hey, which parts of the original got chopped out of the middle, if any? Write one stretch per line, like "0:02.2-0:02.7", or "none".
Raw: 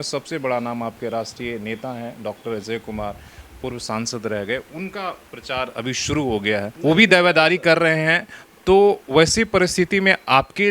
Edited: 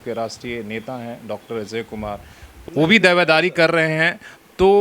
0:03.6-0:06.7